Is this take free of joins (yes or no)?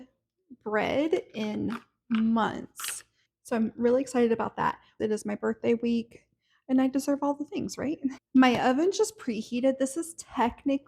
no